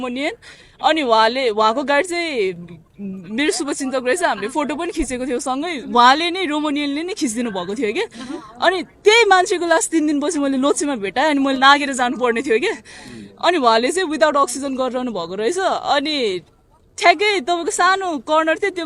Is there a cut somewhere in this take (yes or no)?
no